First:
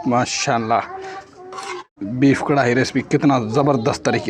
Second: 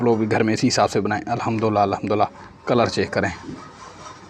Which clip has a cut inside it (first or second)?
first